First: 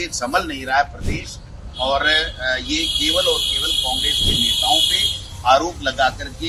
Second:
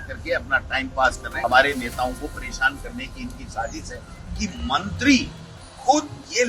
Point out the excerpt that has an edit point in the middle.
second; 2 cuts; at 1.3 s, 4.2 s

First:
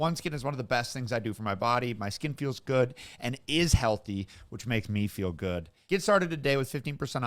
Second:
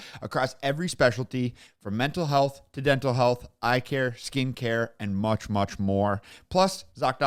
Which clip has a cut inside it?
first; 1 cut; at 5.7 s

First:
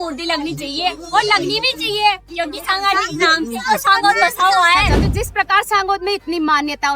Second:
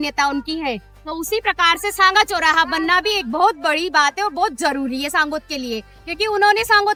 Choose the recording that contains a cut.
first; 2 cuts; at 2.3 s, 5.0 s

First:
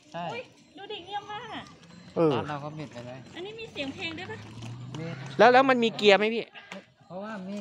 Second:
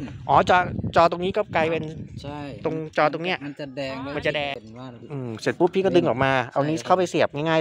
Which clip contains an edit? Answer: second; 1 cut; at 4.6 s

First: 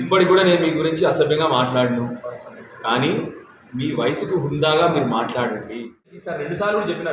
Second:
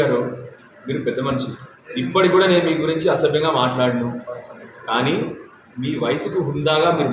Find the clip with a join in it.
first; 1 cut; at 6.2 s

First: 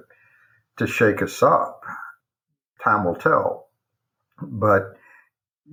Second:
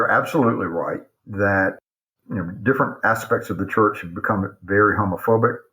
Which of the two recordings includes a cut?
second; 1 cut; at 1.8 s

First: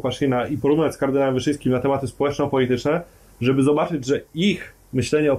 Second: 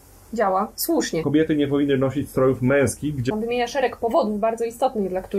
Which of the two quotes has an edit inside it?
second; 2 cuts; at 1.2 s, 3.3 s

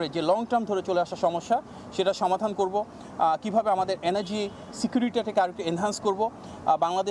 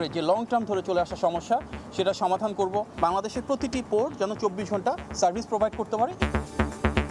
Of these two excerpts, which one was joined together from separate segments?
second; 2 cuts; at 2.9 s, 6.1 s

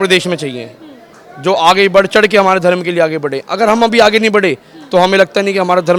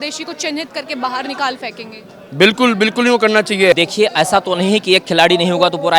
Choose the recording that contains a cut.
second; 1 cut; at 3.8 s

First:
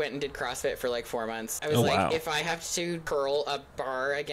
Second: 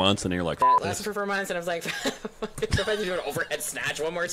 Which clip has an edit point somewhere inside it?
first; 2 cuts; at 1.5 s, 3.0 s

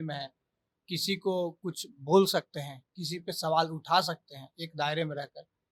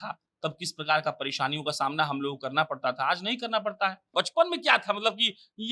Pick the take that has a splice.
second; 1 cut; at 4.1 s

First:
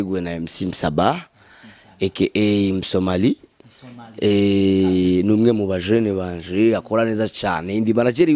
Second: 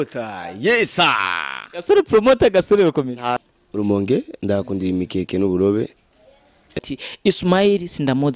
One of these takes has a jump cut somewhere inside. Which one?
second; 2 cuts; at 3.4 s, 6.8 s

